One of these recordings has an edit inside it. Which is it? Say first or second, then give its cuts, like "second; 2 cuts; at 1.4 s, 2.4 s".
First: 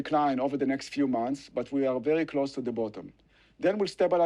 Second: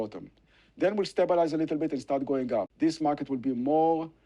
second; 1 cut; at 2.7 s